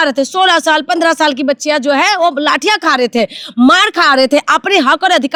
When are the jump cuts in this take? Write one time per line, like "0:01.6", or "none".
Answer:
none